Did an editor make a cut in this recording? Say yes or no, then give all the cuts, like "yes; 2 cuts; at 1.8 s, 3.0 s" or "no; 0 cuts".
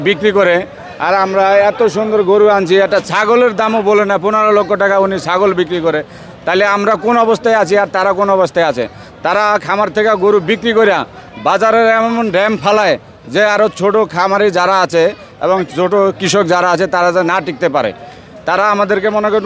no; 0 cuts